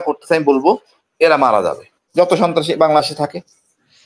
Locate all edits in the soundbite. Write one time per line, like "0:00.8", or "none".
0:02.1